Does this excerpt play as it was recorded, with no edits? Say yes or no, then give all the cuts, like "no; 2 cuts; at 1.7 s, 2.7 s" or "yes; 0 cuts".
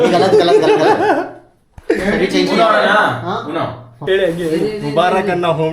no; 1 cut; at 3.9 s